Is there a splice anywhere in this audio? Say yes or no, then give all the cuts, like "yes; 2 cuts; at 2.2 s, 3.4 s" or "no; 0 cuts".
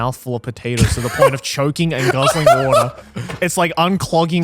no; 0 cuts